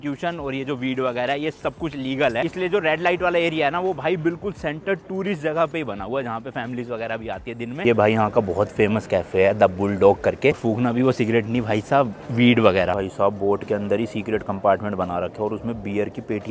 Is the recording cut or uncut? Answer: cut